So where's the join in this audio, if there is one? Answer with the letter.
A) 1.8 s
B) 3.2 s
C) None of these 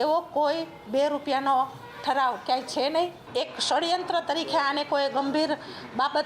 B